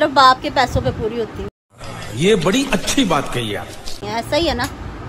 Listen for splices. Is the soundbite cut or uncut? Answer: uncut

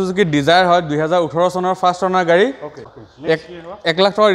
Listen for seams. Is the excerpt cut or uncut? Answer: cut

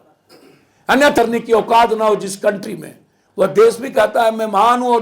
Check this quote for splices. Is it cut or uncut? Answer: cut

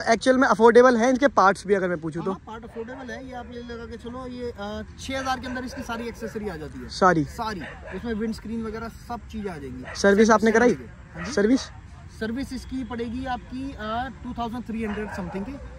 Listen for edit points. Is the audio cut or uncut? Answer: uncut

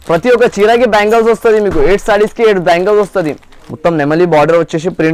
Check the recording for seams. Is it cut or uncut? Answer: cut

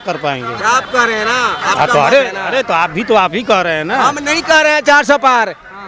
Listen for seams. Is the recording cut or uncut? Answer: uncut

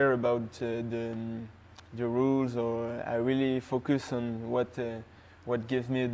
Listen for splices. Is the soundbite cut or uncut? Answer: uncut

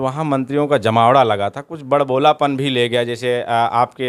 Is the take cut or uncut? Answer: uncut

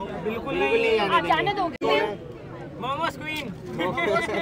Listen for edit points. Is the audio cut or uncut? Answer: cut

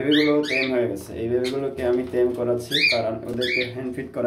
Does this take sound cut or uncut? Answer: uncut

